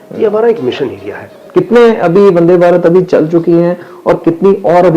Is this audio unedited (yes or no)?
no